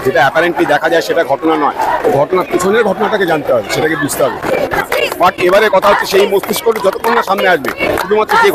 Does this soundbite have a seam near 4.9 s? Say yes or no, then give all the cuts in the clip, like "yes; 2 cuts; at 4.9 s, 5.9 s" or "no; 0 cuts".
no; 0 cuts